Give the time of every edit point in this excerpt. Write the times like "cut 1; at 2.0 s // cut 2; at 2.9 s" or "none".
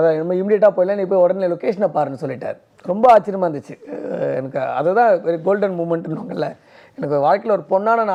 none